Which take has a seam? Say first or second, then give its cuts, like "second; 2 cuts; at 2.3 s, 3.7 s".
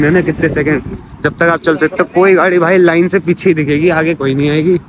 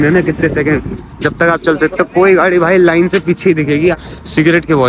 second; 1 cut; at 4.0 s